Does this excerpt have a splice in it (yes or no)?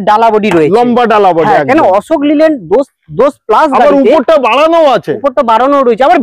no